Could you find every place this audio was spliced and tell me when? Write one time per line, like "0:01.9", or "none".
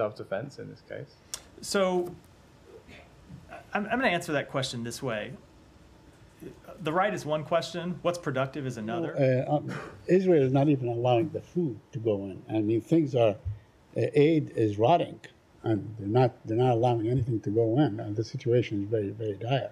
0:09.1